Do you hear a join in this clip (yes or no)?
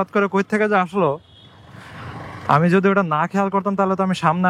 no